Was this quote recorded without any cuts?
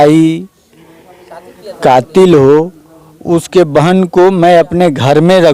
yes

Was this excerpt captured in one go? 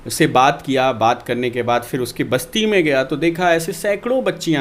yes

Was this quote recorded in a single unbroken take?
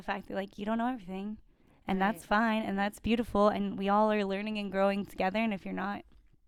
yes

